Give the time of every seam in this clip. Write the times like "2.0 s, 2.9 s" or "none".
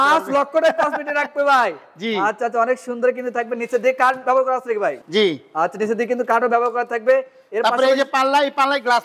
none